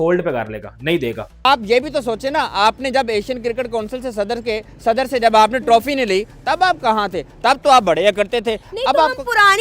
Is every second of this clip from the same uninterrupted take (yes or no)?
no